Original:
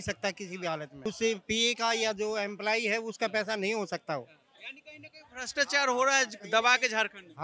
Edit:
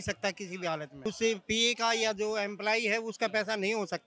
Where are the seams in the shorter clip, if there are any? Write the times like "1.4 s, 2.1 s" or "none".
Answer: none